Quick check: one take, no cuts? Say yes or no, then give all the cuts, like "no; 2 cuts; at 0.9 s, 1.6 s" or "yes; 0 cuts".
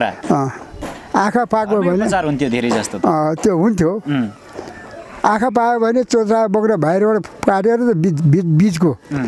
yes; 0 cuts